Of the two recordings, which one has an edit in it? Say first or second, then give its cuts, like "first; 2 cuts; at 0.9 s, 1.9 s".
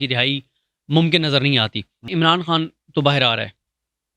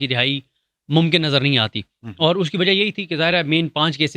first; 1 cut; at 2.0 s